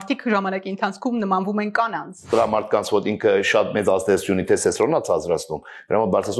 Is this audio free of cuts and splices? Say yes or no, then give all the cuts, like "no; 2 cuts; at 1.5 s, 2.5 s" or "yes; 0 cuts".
no; 1 cut; at 2.3 s